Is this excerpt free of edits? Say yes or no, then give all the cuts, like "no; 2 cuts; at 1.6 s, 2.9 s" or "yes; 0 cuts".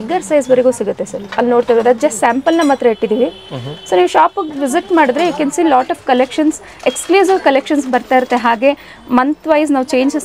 yes; 0 cuts